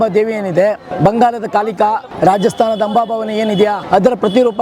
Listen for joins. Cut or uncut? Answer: cut